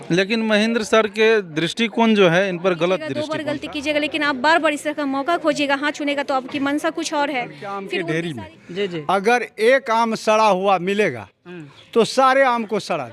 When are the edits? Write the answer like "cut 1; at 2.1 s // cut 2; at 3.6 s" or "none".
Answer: cut 1; at 3.3 s // cut 2; at 7.8 s